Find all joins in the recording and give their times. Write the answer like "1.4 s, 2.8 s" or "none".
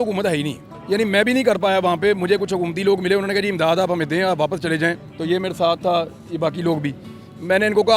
none

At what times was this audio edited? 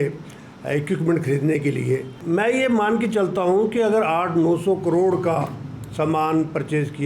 2.1 s

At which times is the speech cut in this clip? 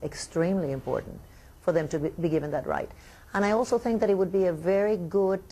4.5 s

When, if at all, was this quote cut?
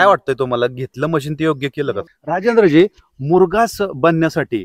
2.1 s

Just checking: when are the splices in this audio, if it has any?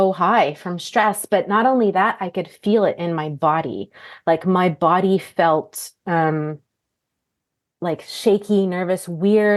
none

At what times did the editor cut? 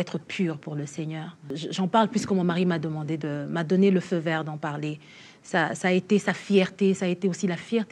1.5 s

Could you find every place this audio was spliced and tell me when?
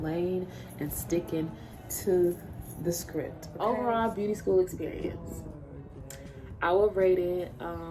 3.4 s

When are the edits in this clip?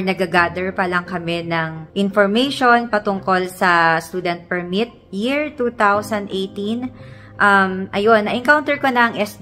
none

